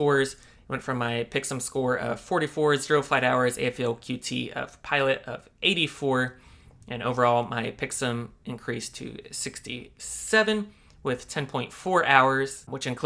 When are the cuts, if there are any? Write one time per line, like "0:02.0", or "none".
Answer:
none